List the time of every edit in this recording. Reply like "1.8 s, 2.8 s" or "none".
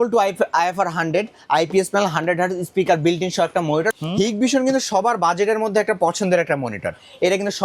3.9 s